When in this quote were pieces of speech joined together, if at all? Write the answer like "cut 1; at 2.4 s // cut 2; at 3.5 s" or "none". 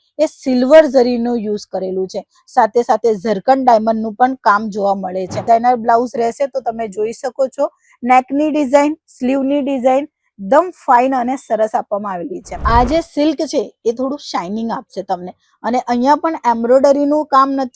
cut 1; at 5.4 s // cut 2; at 12.5 s